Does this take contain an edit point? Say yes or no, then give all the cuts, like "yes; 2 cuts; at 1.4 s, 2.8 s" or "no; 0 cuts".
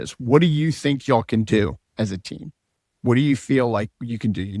no; 0 cuts